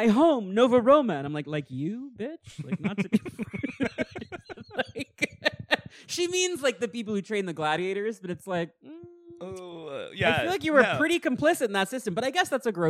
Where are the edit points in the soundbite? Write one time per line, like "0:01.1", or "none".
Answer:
none